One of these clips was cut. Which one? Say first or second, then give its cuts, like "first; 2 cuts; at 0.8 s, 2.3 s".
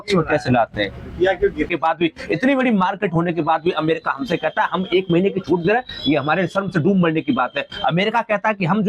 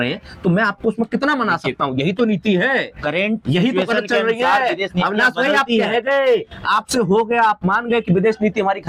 first; 1 cut; at 1.7 s